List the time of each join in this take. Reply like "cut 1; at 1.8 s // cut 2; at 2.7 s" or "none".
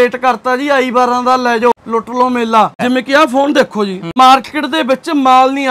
cut 1; at 1.7 s // cut 2; at 2.8 s // cut 3; at 4.1 s